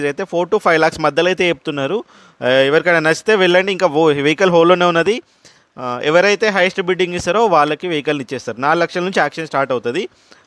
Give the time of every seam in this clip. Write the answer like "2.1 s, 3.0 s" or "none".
none